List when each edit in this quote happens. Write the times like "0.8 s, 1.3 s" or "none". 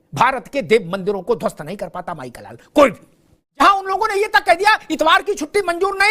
3.6 s